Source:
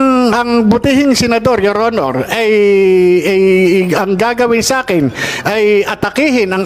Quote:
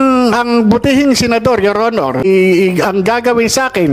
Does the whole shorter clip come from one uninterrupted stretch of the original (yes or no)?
no